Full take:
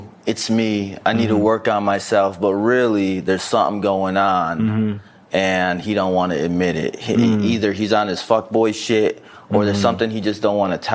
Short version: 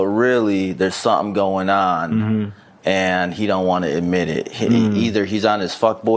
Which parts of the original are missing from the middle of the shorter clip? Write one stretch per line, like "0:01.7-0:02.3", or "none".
none

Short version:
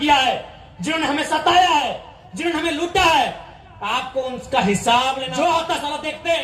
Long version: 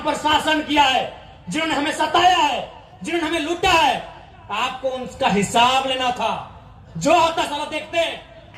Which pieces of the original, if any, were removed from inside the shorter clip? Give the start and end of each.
0:05.9-0:06.9

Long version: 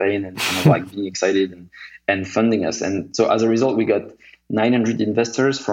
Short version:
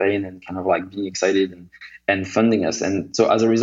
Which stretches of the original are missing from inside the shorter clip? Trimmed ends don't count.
none

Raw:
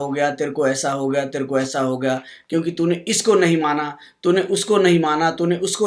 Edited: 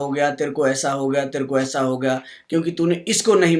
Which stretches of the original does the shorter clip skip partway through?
none

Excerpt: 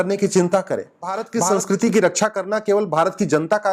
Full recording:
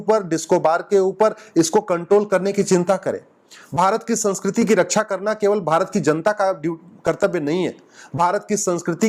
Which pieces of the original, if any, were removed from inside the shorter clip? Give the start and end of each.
0:03.6-0:04.0

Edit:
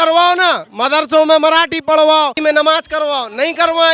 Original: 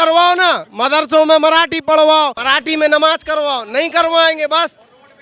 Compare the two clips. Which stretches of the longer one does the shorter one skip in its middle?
0:02.4-0:02.7

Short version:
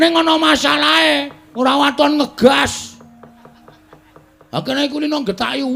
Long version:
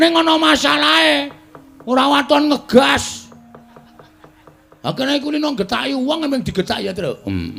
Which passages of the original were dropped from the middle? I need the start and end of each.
0:01.4-0:01.7

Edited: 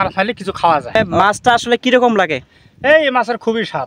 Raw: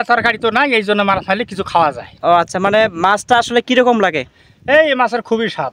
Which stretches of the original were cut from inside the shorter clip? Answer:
0:02.1-0:02.8

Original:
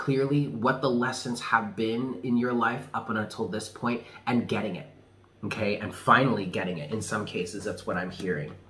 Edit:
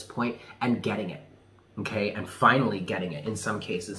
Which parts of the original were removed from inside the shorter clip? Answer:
none

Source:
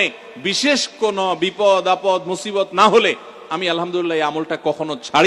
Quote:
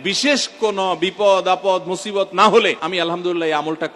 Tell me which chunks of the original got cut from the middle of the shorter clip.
0:03.2-0:03.5

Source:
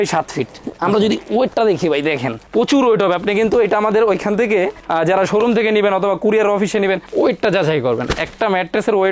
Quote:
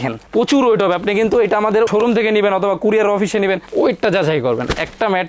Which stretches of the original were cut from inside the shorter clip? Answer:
0:04.1-0:05.3

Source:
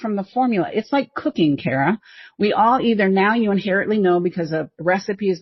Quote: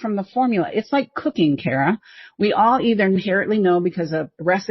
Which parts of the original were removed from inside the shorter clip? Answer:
0:03.2-0:03.6

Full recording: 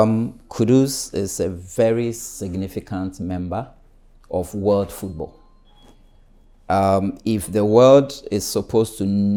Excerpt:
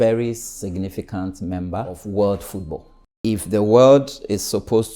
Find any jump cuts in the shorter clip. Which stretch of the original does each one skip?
0:03.8-0:04.5
0:05.6-0:07.2

